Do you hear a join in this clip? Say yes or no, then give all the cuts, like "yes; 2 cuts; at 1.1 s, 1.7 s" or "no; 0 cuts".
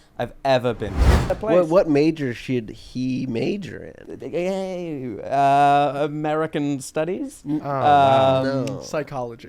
yes; 1 cut; at 1.3 s